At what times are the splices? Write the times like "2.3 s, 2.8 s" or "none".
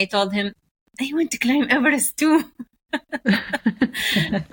none